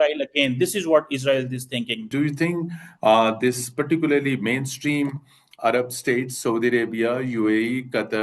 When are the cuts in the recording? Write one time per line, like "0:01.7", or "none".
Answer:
0:02.1